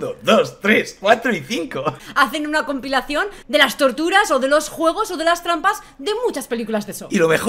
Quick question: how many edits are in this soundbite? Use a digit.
1